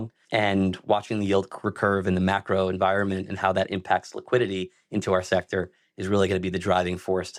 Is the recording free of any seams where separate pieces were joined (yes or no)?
yes